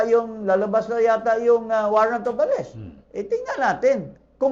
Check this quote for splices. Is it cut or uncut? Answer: uncut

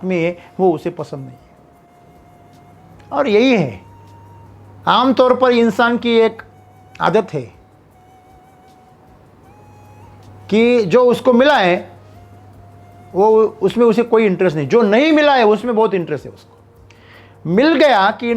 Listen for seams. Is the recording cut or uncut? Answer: uncut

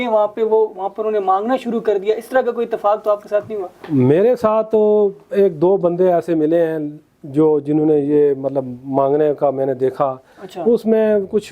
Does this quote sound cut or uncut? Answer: uncut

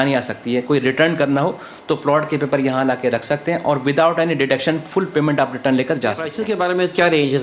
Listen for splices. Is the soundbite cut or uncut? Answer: cut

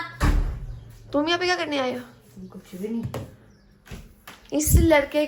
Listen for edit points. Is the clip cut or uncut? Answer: uncut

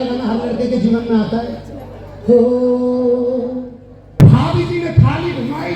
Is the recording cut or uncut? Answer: cut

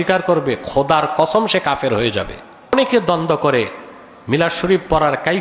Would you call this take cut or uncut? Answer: cut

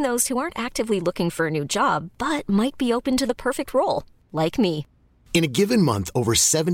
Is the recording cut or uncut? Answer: uncut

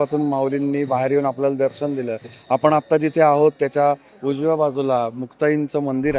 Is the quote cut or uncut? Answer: uncut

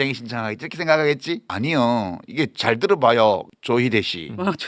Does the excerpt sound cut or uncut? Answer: cut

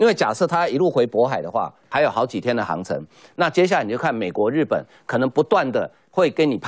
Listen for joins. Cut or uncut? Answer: cut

